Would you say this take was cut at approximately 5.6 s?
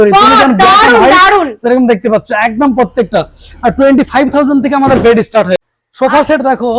yes; 1 cut; at 5.6 s

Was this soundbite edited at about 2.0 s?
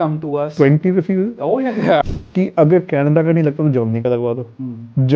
yes; 1 cut; at 2.0 s

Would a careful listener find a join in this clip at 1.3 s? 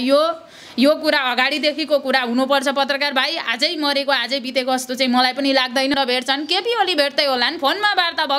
no; 1 cut; at 5.9 s

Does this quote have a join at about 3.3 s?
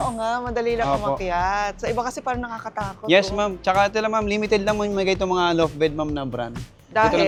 no; 0 cuts

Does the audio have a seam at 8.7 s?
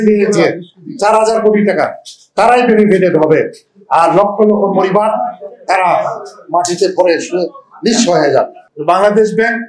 yes; 1 cut; at 8.7 s

